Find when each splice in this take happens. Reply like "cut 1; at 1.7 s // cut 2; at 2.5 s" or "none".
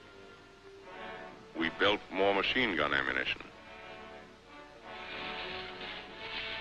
cut 1; at 1.3 s

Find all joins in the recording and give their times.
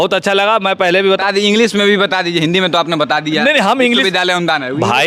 cut 1; at 1.2 s

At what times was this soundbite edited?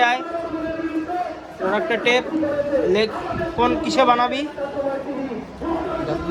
none

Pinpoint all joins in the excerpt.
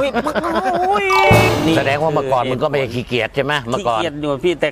cut 1; at 1.4 s

